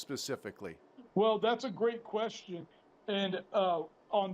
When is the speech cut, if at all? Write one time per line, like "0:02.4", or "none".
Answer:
0:00.9